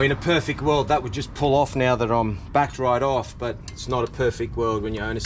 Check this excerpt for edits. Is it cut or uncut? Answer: uncut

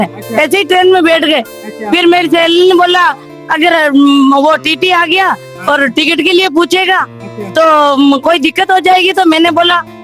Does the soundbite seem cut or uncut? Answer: uncut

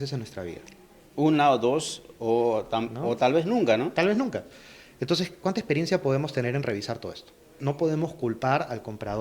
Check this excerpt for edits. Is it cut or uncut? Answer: cut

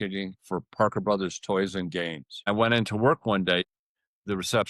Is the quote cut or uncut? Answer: cut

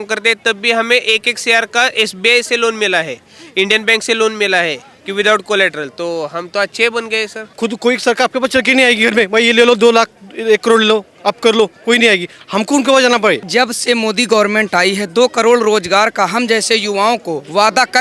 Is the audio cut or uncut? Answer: cut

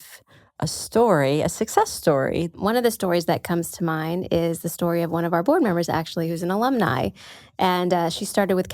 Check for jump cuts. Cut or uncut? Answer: cut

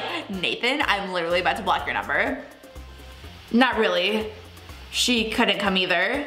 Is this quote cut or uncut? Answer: uncut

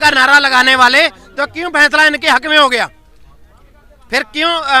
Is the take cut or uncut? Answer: uncut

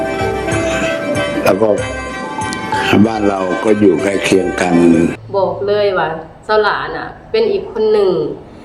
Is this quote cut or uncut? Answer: cut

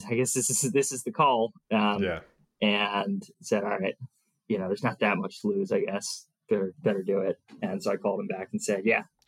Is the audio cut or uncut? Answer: uncut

